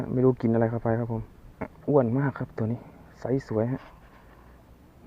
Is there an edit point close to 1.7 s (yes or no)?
yes